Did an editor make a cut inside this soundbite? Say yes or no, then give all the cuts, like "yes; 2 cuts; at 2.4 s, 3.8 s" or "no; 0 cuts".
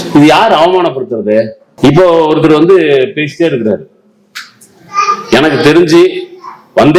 yes; 1 cut; at 1.6 s